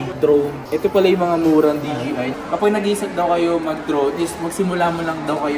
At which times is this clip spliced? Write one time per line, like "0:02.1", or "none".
0:02.3